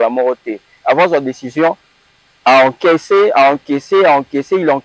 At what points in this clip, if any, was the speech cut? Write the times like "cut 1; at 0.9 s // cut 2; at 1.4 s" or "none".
none